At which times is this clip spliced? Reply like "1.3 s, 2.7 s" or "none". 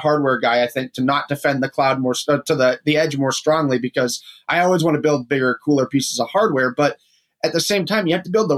none